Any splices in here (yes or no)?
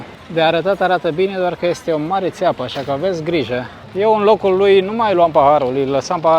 no